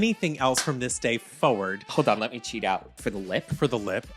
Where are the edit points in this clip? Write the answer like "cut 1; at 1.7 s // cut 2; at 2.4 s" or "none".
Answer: cut 1; at 1.8 s // cut 2; at 3.0 s